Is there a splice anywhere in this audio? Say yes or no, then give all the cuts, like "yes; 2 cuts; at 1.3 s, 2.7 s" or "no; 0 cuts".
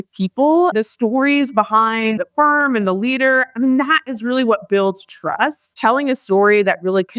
yes; 3 cuts; at 0.7 s, 2.2 s, 5.7 s